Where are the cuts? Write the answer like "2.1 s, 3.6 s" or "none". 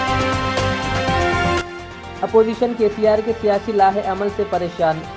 none